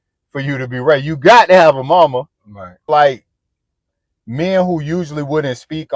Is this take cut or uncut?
cut